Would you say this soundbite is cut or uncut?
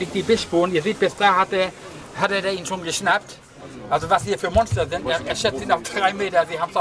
uncut